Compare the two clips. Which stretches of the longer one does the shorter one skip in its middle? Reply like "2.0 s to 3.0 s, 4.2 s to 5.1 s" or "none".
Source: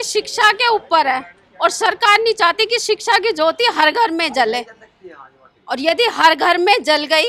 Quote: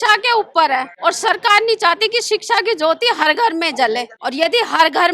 1.3 s to 1.5 s, 4.7 s to 5.6 s